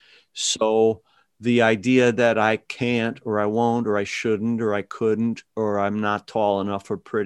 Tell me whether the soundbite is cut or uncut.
uncut